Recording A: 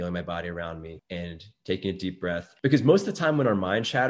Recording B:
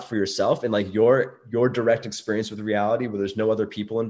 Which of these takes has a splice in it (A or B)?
A